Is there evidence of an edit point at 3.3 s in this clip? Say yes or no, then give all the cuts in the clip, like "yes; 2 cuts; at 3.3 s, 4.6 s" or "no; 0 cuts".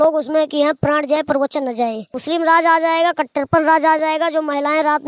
no; 1 cut; at 2.1 s